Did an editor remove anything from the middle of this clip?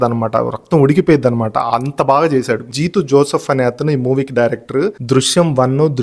yes; 2 cuts; at 2.7 s, 5.0 s

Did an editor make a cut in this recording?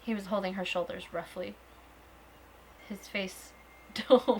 yes; 1 cut; at 2.8 s

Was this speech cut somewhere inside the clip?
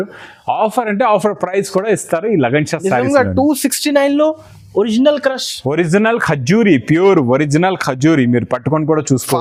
no; 0 cuts

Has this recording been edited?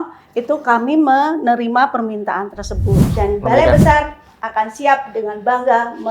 yes; 1 cut; at 3.1 s

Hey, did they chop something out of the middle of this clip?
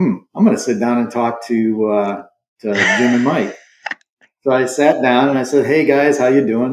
no; 0 cuts

